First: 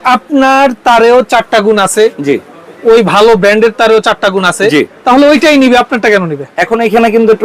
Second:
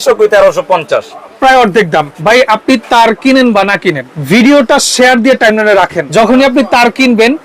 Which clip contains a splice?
second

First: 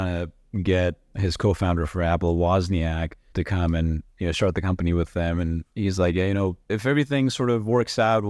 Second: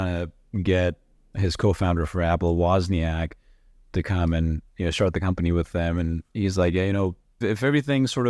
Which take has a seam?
first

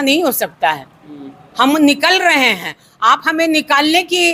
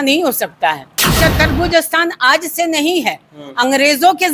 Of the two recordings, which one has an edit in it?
second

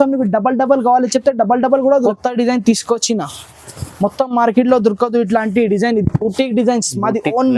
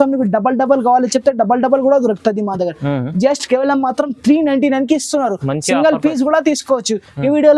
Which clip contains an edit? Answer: first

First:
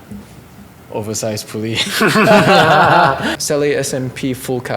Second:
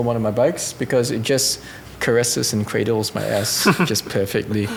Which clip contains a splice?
first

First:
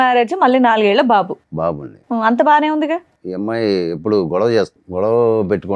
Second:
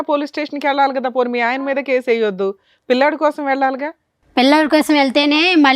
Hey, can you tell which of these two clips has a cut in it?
first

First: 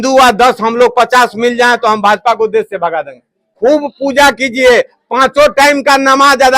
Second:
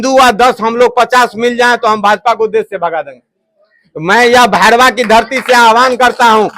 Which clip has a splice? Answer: first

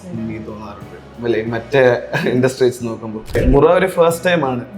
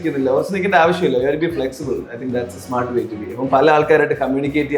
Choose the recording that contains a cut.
first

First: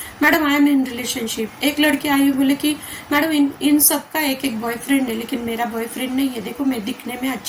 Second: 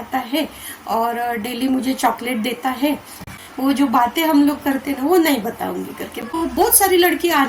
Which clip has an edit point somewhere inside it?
second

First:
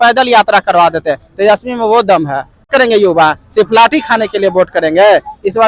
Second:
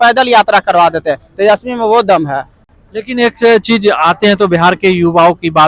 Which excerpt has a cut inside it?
first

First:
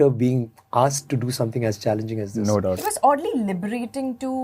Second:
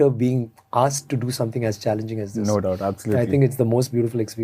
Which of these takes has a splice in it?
first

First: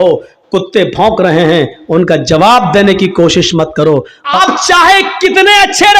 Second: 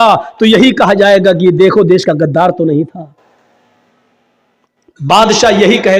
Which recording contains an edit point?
first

